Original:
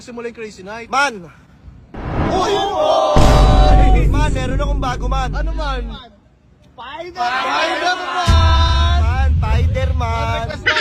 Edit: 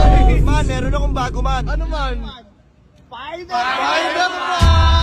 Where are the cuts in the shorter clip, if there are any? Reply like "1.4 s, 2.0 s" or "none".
none